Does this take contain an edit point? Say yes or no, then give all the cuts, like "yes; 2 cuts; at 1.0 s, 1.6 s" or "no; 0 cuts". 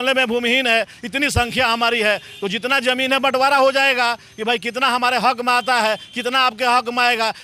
no; 0 cuts